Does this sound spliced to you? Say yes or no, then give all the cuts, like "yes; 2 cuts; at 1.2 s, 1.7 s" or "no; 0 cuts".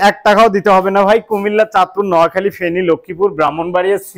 no; 0 cuts